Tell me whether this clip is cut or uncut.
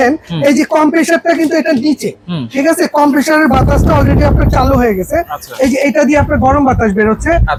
uncut